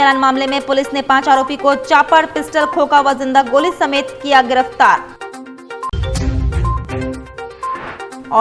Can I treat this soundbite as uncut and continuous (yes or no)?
yes